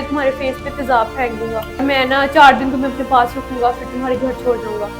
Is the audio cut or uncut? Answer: cut